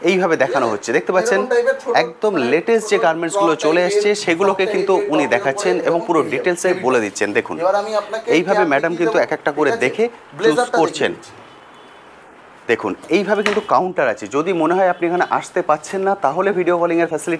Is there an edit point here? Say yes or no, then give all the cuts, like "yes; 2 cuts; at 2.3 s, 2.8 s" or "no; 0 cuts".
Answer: no; 0 cuts